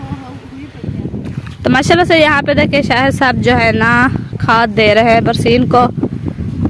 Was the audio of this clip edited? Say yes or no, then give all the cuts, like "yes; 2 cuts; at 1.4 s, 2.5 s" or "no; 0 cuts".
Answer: yes; 1 cut; at 1.2 s